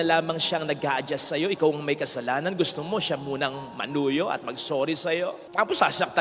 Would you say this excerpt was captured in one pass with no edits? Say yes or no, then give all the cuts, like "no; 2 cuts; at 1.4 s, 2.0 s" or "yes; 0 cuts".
yes; 0 cuts